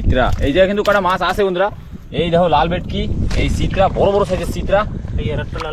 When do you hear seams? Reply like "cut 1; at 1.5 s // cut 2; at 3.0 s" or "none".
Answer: none